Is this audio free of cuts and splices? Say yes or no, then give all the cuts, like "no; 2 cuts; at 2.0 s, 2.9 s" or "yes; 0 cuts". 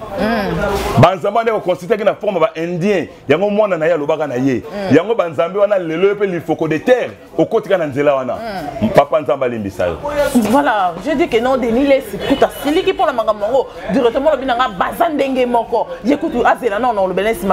yes; 0 cuts